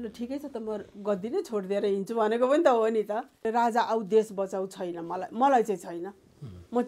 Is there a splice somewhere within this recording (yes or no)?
yes